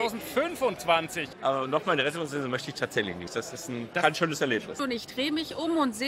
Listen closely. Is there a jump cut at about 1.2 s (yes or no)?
yes